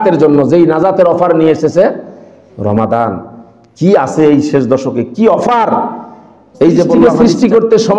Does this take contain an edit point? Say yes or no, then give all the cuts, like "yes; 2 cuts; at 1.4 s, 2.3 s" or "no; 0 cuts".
yes; 1 cut; at 7.0 s